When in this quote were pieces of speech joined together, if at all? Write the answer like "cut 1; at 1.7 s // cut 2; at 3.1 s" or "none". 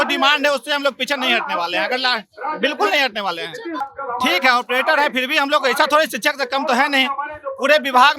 cut 1; at 3.9 s